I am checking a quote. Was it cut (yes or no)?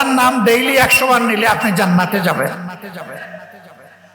no